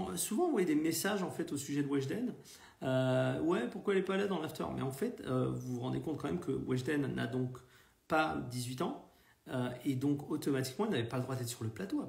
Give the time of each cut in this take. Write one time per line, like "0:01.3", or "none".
none